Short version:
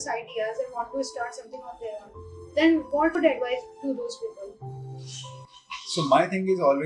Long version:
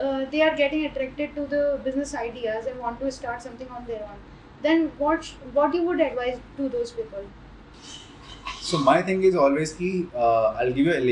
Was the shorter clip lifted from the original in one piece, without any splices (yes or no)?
no